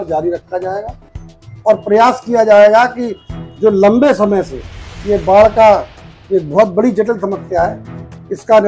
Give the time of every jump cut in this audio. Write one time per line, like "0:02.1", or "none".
none